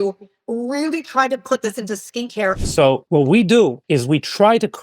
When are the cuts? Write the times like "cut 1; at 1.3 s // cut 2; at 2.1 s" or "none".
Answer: cut 1; at 2.6 s // cut 2; at 3.8 s